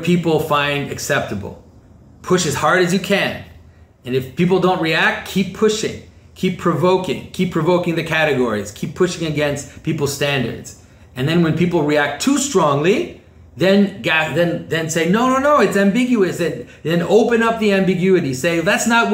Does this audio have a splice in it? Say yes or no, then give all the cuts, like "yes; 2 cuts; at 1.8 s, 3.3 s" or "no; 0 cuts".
no; 0 cuts